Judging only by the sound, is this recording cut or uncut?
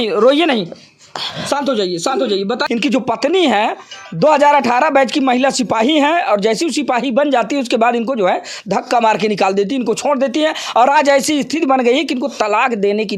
cut